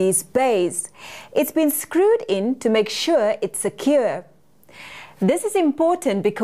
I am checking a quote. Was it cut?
no; 0 cuts

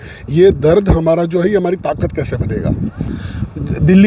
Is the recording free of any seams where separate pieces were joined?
no; 1 cut; at 3.0 s

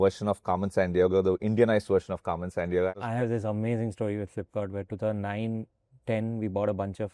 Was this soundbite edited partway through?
yes; 1 cut; at 2.9 s

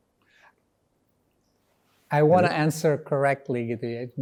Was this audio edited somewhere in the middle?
no; 0 cuts

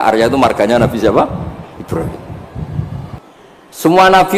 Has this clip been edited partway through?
yes; 1 cut; at 3.2 s

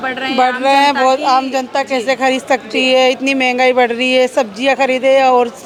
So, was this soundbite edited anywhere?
no; 0 cuts

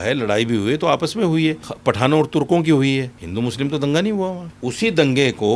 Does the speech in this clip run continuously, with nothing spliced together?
no; 3 cuts; at 1.7 s, 3.2 s, 4.5 s

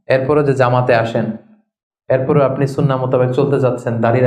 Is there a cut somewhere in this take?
no; 0 cuts

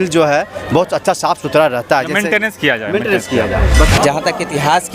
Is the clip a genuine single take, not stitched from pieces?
no; 1 cut; at 3.9 s

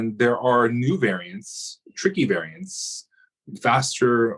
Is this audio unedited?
yes; 0 cuts

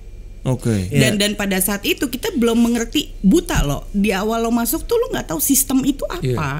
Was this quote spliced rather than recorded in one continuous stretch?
yes; 1 cut; at 0.9 s

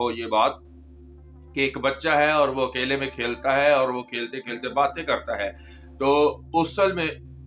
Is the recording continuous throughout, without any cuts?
yes; 0 cuts

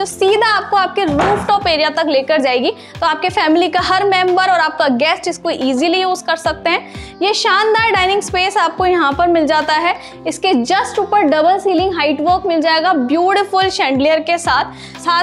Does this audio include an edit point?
no; 0 cuts

